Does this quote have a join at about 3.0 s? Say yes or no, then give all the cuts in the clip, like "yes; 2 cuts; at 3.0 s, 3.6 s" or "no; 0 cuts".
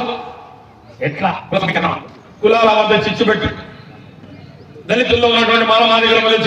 no; 1 cut; at 1.7 s